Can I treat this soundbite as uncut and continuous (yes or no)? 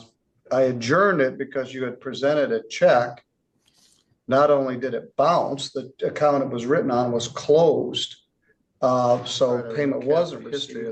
yes